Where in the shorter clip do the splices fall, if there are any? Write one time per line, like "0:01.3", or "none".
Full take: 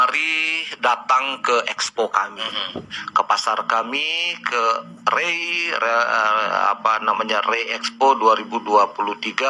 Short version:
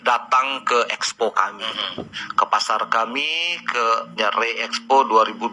0:04.2

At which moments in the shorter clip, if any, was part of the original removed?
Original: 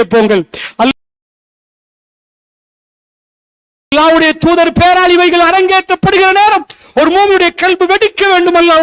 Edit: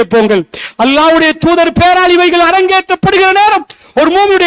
0:00.9

